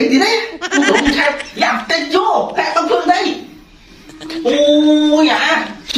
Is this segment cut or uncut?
uncut